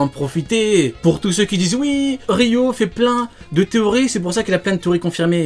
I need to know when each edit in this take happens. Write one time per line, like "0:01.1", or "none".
0:00.9
0:02.2